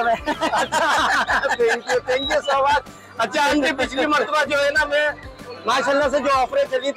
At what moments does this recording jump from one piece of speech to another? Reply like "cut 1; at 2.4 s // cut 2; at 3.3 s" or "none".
none